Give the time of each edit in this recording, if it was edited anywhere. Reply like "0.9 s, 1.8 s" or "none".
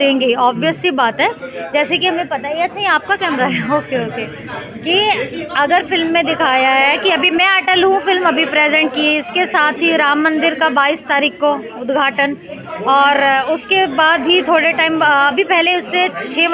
none